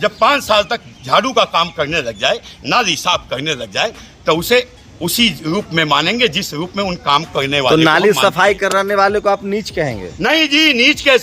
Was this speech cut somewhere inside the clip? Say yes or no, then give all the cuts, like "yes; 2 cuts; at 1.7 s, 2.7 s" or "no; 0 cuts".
no; 0 cuts